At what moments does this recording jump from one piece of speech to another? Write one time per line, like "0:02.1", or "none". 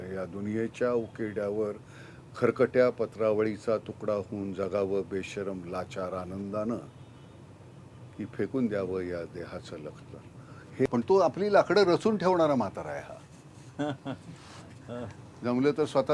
0:10.9